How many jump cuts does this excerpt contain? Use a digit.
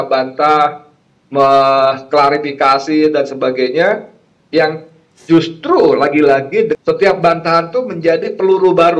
1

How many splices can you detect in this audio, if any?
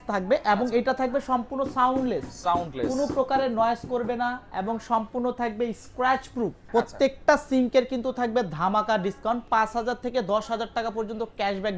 1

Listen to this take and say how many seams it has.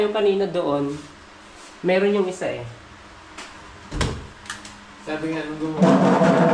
0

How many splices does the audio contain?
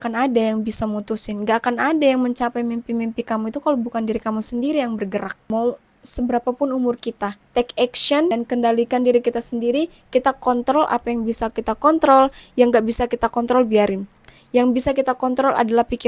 3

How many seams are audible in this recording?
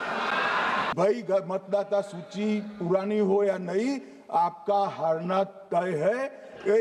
1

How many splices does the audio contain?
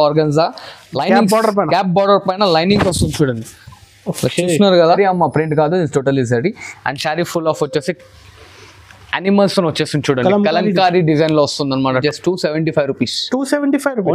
2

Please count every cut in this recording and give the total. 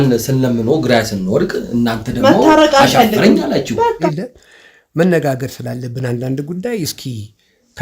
1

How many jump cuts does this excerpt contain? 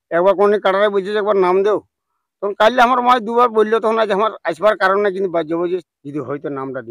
1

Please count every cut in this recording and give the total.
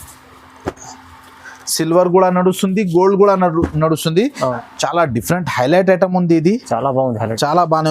1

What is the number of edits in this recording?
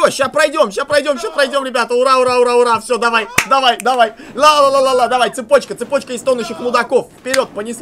0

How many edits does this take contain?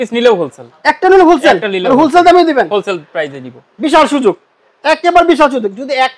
0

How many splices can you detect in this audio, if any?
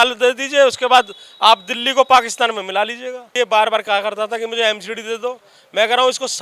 1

